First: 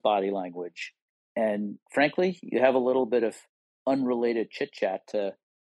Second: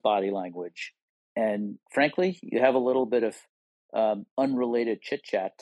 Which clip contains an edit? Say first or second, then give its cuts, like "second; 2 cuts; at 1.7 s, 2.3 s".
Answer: first; 1 cut; at 3.7 s